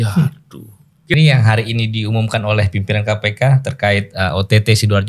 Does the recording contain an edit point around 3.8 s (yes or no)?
no